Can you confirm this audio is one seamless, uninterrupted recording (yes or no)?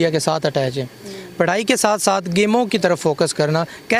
yes